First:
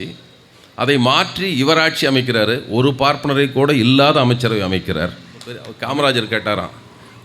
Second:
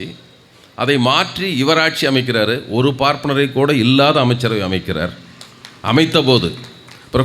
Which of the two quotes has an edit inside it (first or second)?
first